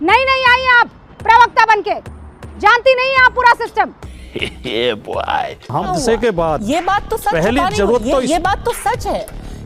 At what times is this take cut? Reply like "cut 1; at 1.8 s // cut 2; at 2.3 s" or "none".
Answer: cut 1; at 5.8 s